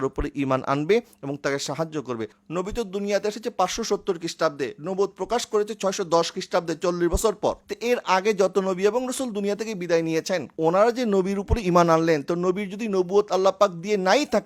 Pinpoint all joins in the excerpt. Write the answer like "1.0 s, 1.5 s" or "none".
2.3 s, 7.7 s, 10.5 s